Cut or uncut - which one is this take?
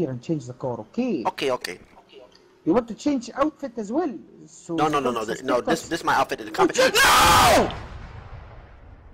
uncut